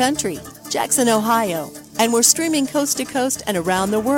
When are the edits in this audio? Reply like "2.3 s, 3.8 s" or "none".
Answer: none